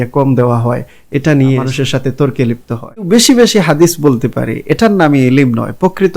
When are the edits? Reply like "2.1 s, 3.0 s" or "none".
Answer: 1.7 s, 3.1 s